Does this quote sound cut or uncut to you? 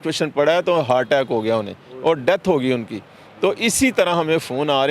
uncut